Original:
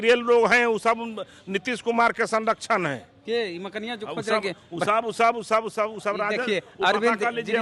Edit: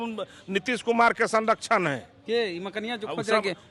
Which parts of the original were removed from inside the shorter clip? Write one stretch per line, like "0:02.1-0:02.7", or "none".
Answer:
none